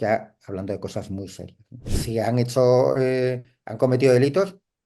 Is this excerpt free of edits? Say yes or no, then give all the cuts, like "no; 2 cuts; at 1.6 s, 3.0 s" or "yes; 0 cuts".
no; 1 cut; at 2.0 s